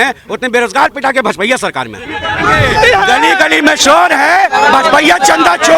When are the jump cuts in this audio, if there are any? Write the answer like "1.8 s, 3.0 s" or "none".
2.4 s